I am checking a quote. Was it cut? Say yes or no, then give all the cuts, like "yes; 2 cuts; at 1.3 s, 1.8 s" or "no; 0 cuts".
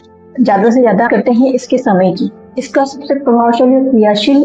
yes; 1 cut; at 1.1 s